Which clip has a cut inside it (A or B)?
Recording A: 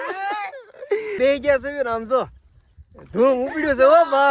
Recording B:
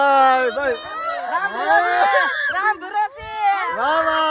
A